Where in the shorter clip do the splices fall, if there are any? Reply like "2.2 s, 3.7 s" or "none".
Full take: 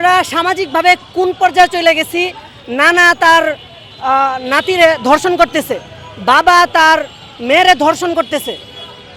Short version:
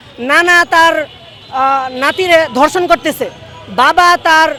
none